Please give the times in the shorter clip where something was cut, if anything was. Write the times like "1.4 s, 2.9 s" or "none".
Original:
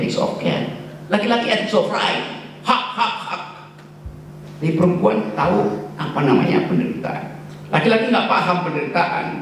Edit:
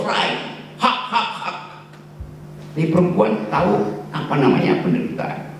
none

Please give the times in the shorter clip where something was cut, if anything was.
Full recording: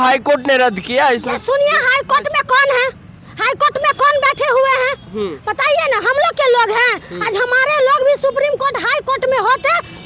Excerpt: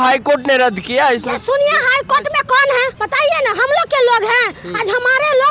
3.0 s

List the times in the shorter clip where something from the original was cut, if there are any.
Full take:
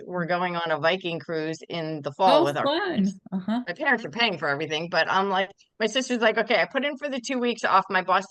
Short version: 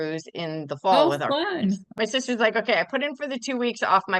1.9 s

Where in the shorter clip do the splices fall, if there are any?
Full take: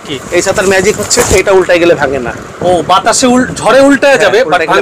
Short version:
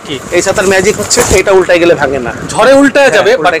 2.5 s

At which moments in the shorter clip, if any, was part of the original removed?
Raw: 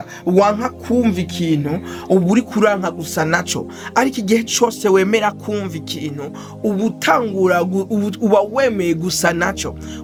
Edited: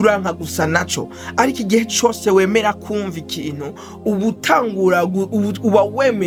none

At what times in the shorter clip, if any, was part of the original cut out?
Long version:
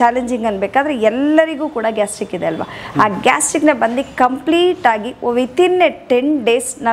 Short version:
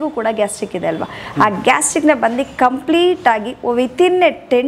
none

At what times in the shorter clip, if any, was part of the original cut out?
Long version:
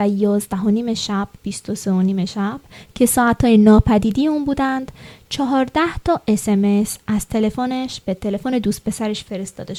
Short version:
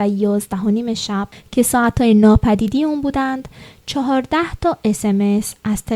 1.4 s

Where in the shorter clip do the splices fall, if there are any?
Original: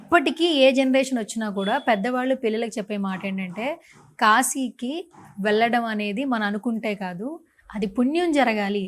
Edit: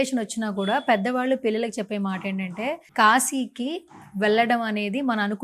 2.8 s

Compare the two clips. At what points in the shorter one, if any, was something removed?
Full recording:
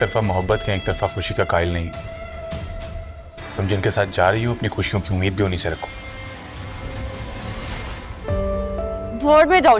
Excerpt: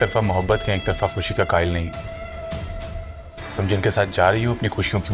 none

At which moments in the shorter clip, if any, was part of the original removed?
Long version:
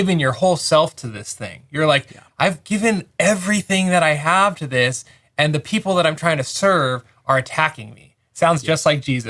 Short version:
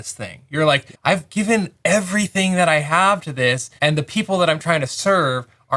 0.9 s, 3.7 s

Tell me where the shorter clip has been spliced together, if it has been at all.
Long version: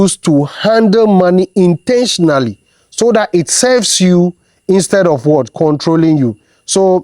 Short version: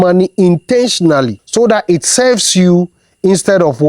1.4 s

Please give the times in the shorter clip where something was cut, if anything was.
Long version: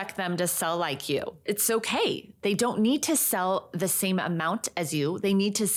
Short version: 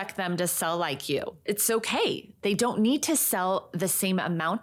none

